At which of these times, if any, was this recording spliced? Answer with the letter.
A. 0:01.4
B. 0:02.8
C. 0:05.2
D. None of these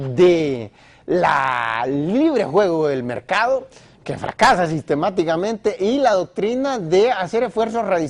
B